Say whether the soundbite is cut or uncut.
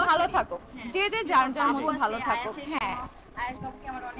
uncut